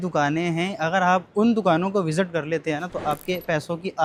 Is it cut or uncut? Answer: uncut